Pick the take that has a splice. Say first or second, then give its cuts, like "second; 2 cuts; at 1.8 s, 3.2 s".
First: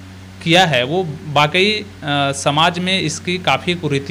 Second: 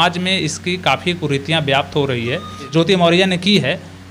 second; 1 cut; at 2.7 s